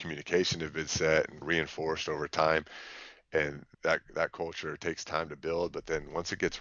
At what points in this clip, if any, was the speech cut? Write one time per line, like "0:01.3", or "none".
0:01.4
0:03.6